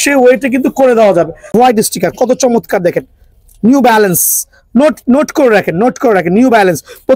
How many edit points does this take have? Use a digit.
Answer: 1